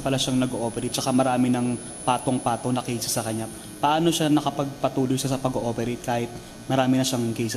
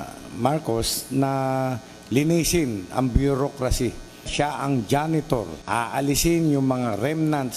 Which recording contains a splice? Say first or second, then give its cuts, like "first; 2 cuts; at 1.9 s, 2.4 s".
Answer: second; 2 cuts; at 4.3 s, 5.6 s